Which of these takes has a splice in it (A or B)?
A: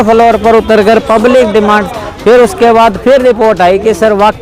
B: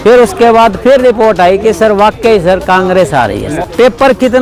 B